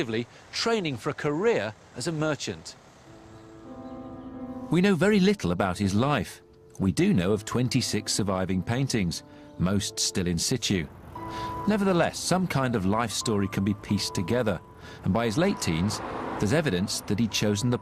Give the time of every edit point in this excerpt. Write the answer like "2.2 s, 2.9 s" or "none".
9.2 s

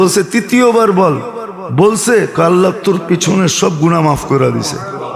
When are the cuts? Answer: none

